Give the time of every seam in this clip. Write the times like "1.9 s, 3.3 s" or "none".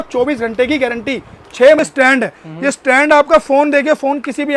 1.8 s